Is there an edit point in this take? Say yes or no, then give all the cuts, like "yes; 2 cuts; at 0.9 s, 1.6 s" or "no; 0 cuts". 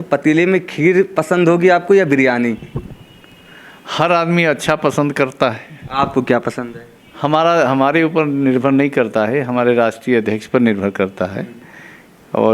no; 0 cuts